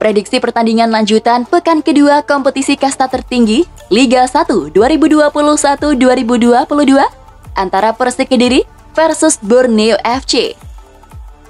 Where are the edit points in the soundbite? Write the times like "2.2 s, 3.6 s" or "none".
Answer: 10.6 s